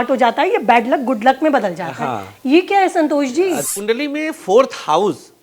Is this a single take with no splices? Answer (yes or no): no